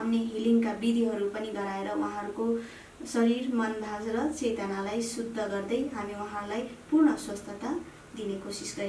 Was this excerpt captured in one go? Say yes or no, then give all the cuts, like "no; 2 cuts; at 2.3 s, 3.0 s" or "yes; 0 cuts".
yes; 0 cuts